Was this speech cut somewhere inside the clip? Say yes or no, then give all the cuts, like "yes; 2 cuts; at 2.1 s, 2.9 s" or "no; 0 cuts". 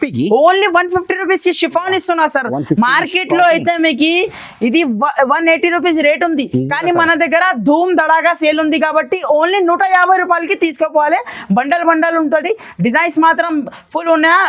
no; 0 cuts